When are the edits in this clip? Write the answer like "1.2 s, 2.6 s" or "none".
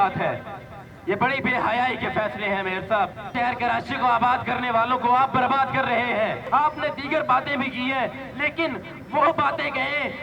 3.3 s, 6.4 s